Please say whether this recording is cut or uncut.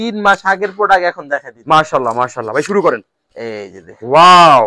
uncut